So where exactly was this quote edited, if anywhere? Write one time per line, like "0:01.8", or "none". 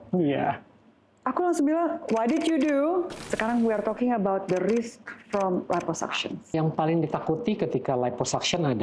0:03.2
0:06.5